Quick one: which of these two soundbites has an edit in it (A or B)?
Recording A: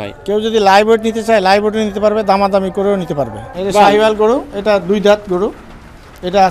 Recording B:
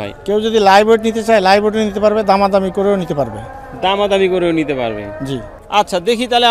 A